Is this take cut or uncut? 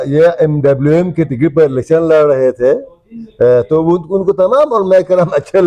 uncut